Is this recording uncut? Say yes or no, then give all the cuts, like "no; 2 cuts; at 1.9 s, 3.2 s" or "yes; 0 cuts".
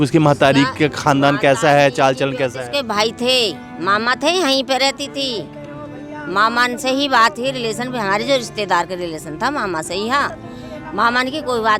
yes; 0 cuts